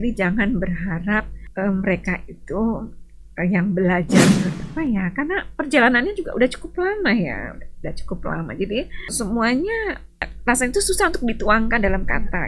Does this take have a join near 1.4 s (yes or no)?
yes